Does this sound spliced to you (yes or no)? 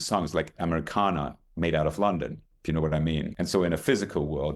yes